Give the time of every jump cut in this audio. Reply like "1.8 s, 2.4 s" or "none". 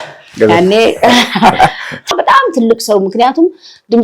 2.2 s